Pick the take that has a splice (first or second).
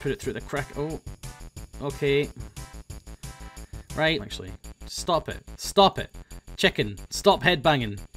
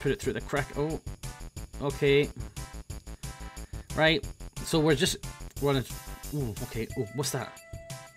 second